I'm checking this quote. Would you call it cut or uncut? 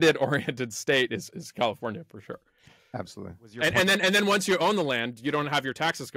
uncut